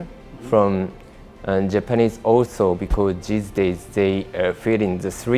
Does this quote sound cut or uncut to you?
uncut